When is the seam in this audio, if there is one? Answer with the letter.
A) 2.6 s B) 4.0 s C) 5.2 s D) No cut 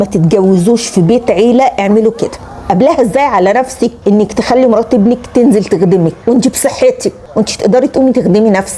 A